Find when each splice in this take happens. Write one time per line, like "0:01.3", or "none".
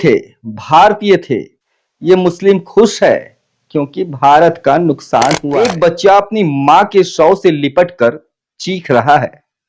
0:05.4